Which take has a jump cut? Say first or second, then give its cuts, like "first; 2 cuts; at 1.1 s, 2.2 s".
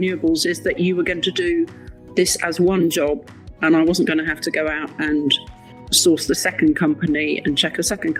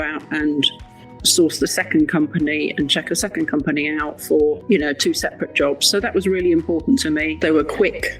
second; 2 cuts; at 4.6 s, 7.3 s